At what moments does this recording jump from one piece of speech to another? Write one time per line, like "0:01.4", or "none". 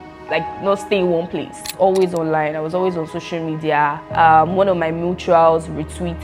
0:01.7
0:04.0